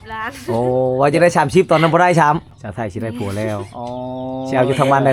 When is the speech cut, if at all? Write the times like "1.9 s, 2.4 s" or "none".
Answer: 2.5 s